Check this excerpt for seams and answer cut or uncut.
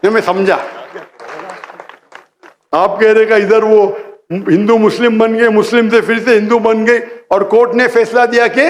cut